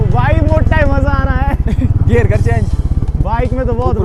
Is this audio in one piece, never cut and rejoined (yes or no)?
yes